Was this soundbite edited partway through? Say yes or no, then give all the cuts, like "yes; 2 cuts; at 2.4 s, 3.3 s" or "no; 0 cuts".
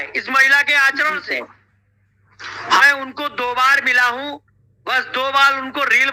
no; 0 cuts